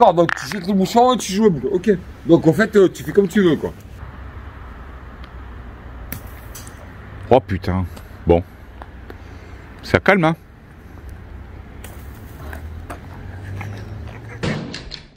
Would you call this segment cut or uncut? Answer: uncut